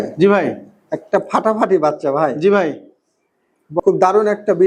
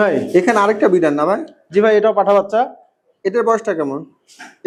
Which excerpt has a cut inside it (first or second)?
first